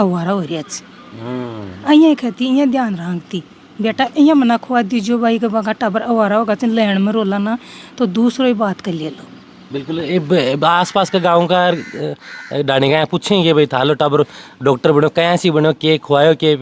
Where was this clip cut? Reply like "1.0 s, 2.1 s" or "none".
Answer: none